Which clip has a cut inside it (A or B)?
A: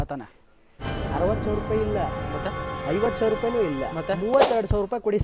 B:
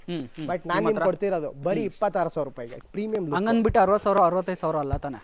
B